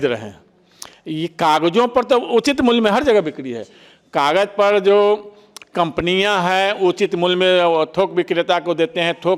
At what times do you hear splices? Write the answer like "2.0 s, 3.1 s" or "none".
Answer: none